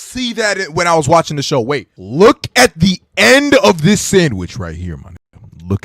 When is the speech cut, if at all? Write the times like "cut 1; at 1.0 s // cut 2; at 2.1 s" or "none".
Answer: cut 1; at 2.0 s